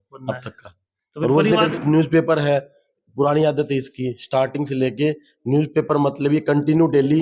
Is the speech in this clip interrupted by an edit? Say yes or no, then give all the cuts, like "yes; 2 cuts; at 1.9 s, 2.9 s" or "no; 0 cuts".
yes; 1 cut; at 1.7 s